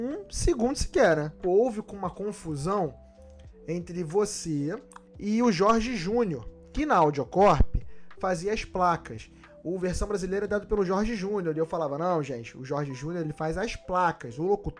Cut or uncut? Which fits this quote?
cut